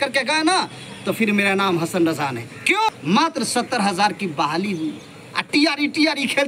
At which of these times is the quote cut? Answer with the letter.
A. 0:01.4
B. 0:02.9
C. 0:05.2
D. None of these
B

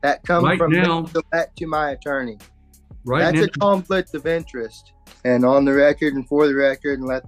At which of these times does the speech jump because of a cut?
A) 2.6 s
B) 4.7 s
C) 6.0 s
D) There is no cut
B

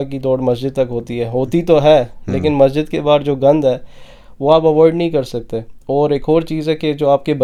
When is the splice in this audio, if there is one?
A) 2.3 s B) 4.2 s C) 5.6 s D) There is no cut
D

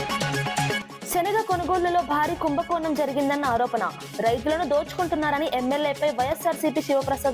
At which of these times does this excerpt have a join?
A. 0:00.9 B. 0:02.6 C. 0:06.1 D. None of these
A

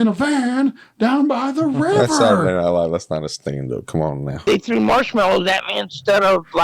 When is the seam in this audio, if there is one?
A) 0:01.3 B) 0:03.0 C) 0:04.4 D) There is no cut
C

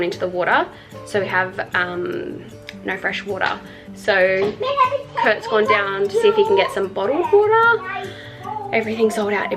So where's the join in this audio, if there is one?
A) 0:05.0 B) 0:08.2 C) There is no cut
C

